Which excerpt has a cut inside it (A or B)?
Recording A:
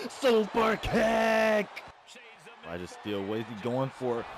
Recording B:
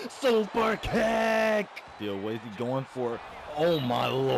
B